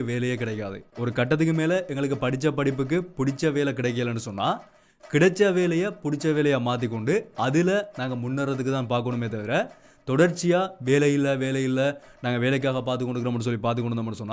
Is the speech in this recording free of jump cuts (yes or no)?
no